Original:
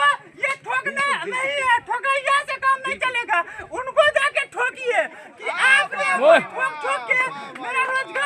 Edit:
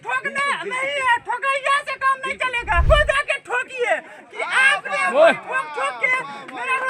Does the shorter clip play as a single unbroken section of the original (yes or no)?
no